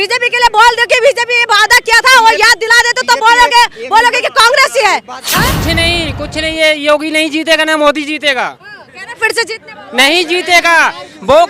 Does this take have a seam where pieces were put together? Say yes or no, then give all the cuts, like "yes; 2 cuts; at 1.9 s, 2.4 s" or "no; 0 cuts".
yes; 1 cut; at 5.2 s